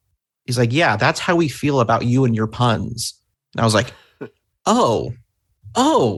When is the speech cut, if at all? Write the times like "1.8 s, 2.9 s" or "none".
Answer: none